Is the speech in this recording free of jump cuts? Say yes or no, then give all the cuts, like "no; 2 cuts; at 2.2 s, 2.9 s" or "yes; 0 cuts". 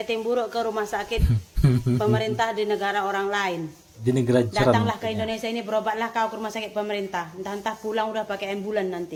yes; 0 cuts